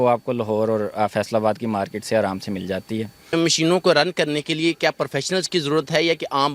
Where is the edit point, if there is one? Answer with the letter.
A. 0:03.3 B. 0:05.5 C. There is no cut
A